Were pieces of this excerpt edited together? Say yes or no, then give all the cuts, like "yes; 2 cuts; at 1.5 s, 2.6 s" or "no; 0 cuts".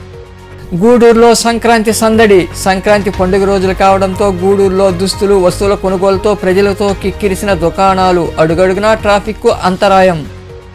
no; 0 cuts